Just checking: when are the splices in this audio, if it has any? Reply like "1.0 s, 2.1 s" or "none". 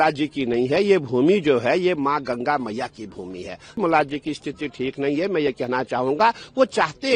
3.8 s